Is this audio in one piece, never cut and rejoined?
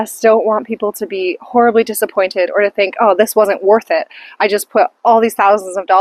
yes; 0 cuts

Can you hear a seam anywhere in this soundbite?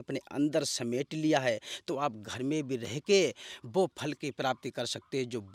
no; 0 cuts

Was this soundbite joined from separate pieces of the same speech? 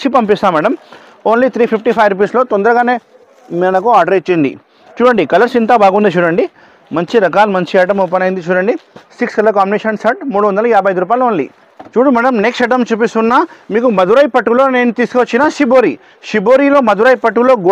no; 0 cuts

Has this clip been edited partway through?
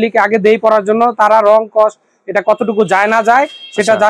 no; 0 cuts

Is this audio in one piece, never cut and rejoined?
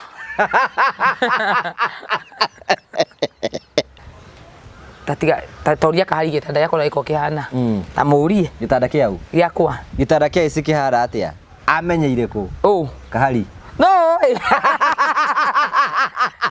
no; 1 cut; at 3.9 s

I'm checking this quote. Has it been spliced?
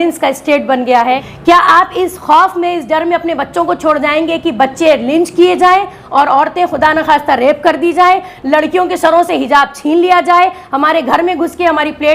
yes; 1 cut; at 1.3 s

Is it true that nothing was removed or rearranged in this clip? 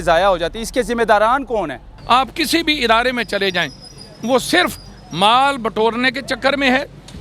no; 1 cut; at 1.9 s

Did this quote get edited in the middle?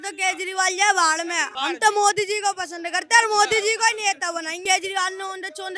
yes; 1 cut; at 4.6 s

